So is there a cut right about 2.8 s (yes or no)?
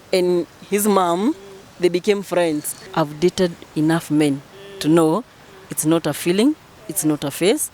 yes